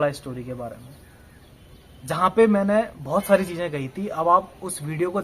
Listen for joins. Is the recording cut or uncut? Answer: uncut